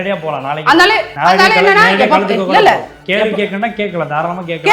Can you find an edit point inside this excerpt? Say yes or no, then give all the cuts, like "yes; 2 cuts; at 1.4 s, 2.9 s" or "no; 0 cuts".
yes; 1 cut; at 1.1 s